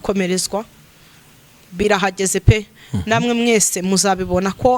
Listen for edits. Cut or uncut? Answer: cut